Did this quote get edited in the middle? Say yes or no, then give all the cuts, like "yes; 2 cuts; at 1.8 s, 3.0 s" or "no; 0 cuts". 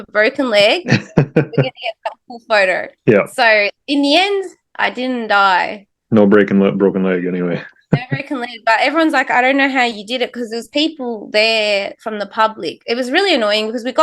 no; 0 cuts